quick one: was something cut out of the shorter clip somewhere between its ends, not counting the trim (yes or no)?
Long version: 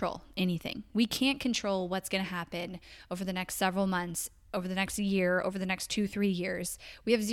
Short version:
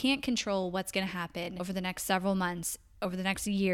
yes